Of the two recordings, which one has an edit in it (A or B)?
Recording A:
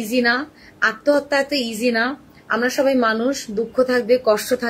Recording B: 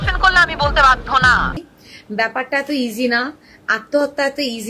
B